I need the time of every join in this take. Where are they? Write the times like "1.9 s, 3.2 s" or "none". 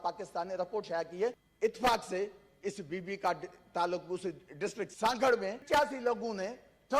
1.5 s, 4.9 s, 5.6 s